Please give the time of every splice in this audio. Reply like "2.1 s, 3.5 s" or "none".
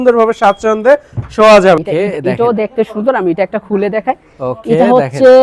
1.8 s